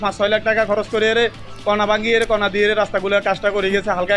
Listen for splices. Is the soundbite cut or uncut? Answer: uncut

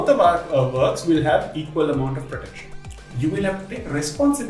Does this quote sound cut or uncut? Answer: cut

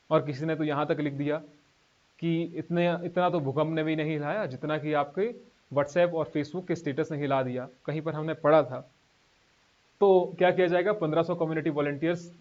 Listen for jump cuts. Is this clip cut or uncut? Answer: uncut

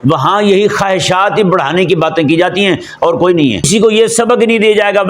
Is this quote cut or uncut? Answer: cut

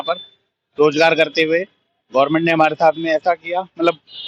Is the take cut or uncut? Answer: uncut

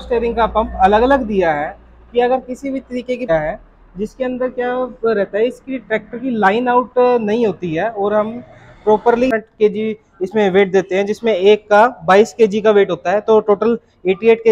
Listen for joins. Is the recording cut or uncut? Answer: cut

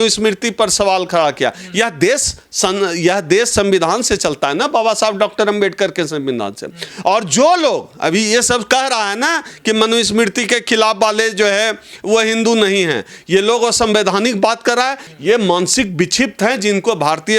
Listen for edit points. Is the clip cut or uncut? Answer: uncut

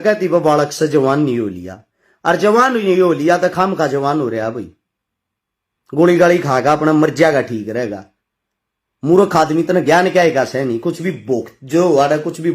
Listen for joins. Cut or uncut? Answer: uncut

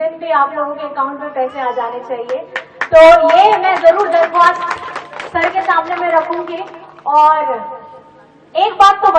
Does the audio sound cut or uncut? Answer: uncut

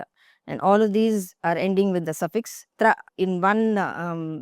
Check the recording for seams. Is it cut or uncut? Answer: cut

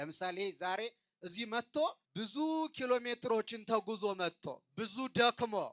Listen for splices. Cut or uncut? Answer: cut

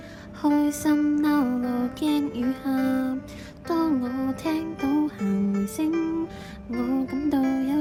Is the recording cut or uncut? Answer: uncut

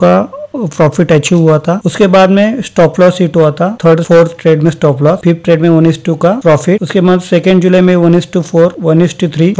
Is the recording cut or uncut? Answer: uncut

